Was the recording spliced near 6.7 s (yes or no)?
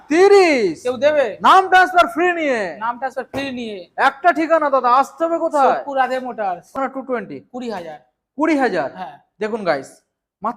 yes